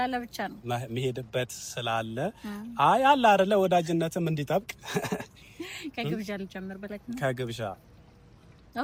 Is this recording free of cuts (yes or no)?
yes